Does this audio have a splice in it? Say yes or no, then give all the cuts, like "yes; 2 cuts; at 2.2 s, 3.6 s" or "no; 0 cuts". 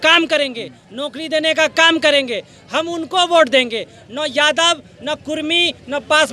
no; 0 cuts